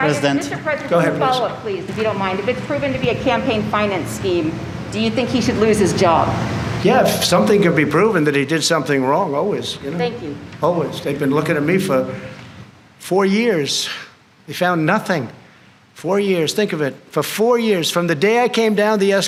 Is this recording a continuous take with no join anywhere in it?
yes; 0 cuts

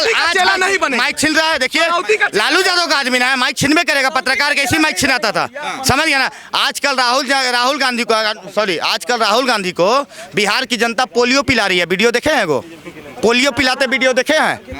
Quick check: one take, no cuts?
yes; 0 cuts

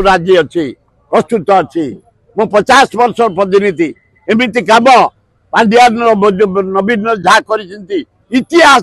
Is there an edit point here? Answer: no; 0 cuts

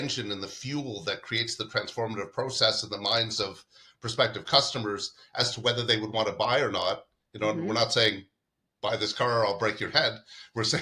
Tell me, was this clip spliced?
no; 0 cuts

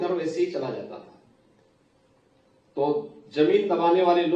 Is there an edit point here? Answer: no; 0 cuts

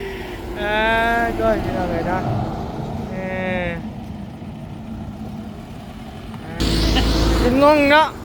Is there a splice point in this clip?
yes; 1 cut; at 6.6 s

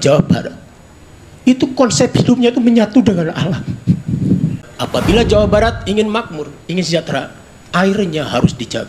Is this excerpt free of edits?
no; 1 cut; at 4.7 s

